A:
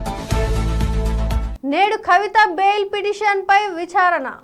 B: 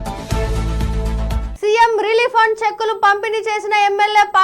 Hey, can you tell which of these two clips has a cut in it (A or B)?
B